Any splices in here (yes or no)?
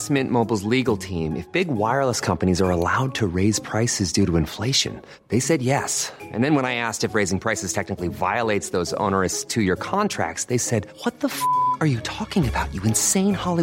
no